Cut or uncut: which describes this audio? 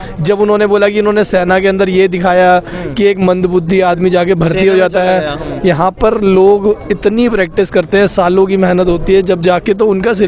uncut